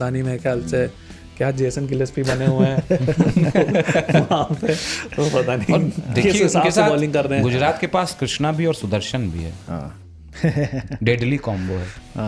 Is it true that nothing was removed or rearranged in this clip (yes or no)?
yes